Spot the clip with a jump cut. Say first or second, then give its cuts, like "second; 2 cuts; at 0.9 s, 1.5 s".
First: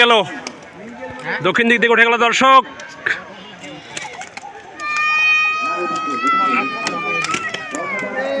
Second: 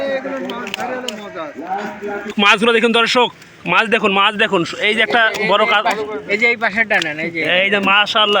second; 1 cut; at 2.3 s